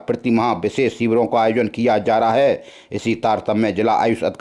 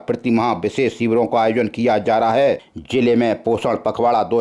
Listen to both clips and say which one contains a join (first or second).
second